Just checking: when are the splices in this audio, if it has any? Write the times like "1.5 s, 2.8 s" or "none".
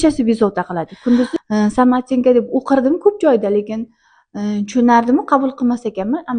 1.3 s